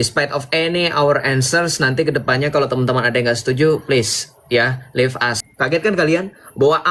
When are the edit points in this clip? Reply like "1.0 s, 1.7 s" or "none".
5.4 s

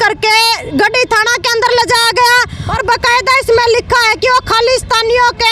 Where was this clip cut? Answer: 2.6 s

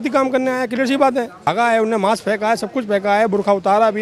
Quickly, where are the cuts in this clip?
1.4 s

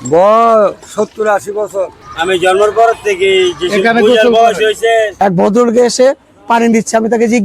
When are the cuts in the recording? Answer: 2.1 s, 5.1 s

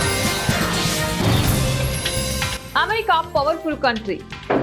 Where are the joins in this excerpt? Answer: 2.6 s

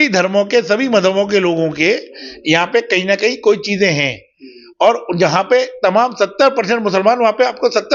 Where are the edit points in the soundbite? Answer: none

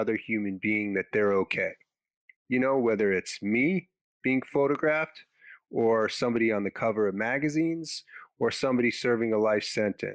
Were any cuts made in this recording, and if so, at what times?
none

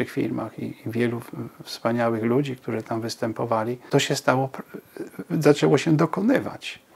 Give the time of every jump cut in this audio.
3.8 s

